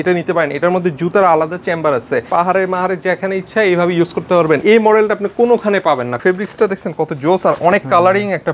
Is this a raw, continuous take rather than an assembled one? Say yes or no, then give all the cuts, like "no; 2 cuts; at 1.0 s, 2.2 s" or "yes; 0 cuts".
no; 3 cuts; at 2.3 s, 4.6 s, 6.2 s